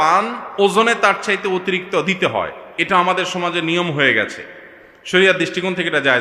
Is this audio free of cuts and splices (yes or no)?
yes